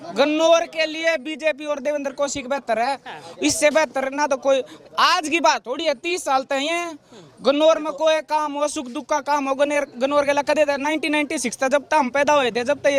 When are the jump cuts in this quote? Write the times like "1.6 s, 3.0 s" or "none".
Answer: none